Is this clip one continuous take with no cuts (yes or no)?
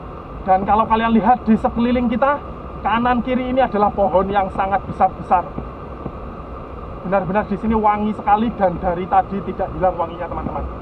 yes